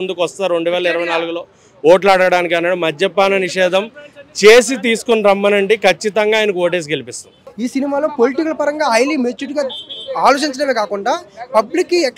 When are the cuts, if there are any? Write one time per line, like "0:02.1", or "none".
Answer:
0:07.3